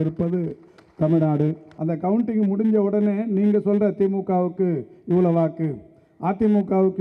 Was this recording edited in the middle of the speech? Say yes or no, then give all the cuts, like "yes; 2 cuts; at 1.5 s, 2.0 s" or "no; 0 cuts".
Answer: yes; 1 cut; at 1.7 s